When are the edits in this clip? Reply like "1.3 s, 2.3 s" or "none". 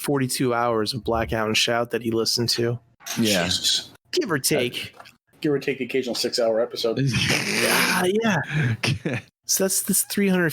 5.2 s, 9.2 s